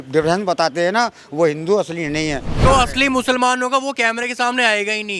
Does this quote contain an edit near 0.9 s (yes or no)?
no